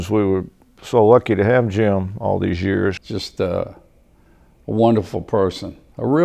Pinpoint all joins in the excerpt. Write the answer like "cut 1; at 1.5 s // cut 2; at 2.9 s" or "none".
cut 1; at 3.1 s